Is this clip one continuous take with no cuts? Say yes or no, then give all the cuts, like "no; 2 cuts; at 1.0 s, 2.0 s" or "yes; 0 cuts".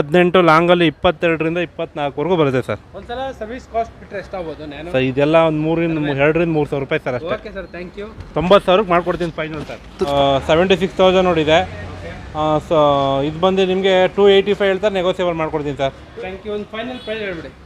no; 2 cuts; at 10.1 s, 16.1 s